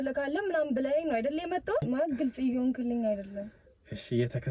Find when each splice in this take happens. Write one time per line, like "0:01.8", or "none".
0:01.8

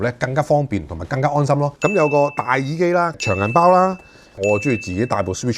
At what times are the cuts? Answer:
0:01.7
0:04.4

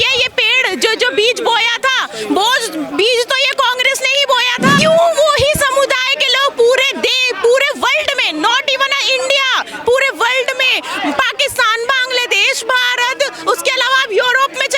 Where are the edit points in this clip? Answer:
0:04.8

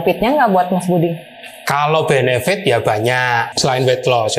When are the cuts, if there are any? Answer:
0:03.5

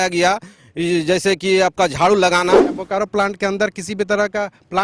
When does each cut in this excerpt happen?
0:02.7

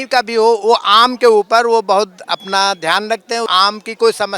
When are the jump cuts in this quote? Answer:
0:03.5

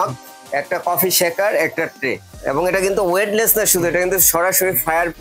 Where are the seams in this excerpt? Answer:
0:02.3

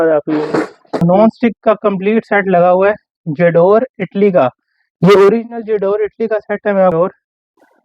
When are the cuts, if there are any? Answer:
0:01.0
0:06.9

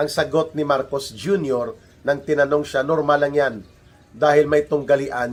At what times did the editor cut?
none

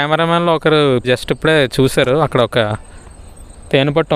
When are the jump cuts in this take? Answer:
0:01.0

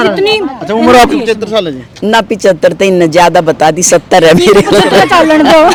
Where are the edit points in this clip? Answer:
none

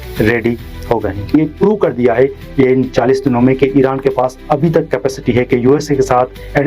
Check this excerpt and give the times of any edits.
0:01.3

